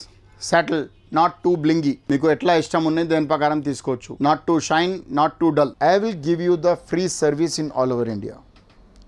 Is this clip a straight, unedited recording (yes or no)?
no